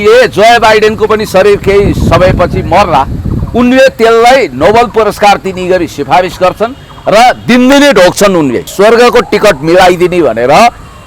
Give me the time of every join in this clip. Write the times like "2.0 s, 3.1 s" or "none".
8.7 s

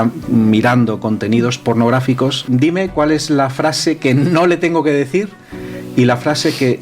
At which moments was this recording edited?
2.5 s

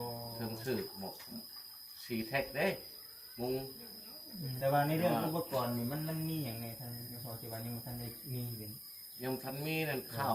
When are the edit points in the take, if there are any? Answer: 4.5 s

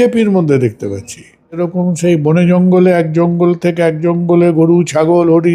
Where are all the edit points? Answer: 1.6 s

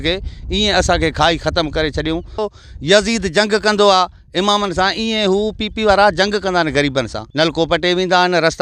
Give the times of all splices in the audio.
2.3 s, 7.2 s

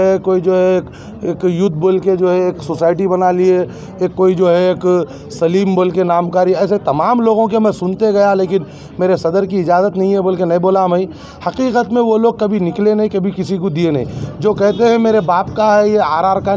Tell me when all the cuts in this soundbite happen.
none

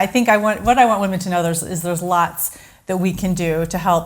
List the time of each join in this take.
none

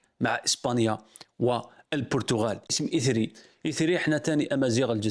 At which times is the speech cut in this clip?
2.7 s

